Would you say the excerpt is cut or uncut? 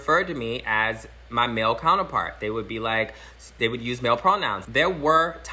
cut